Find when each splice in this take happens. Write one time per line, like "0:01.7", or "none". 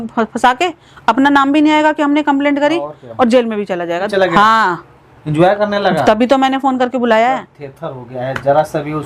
0:04.1